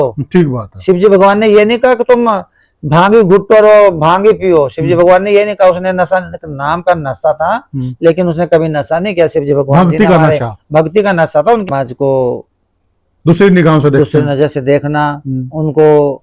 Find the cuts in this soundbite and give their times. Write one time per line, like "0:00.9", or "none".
0:11.6